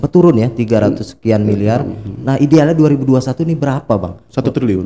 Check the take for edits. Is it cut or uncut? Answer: uncut